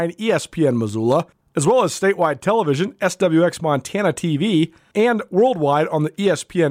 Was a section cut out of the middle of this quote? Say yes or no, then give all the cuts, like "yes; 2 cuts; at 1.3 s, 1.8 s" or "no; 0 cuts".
yes; 2 cuts; at 1.4 s, 4.8 s